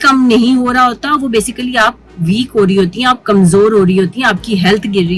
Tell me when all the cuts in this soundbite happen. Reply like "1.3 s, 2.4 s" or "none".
none